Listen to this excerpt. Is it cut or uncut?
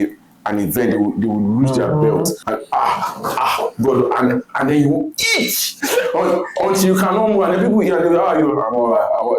cut